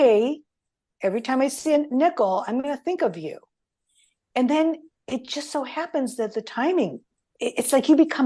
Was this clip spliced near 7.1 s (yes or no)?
yes